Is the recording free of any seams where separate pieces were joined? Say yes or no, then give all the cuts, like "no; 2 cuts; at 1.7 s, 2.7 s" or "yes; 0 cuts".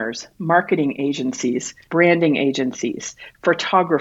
no; 1 cut; at 1.7 s